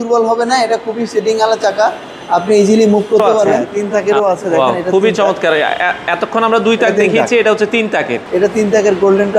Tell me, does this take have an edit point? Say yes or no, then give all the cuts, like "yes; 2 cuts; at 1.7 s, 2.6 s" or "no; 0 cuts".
yes; 2 cuts; at 3.7 s, 8.2 s